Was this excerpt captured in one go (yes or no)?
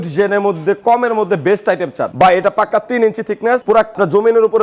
no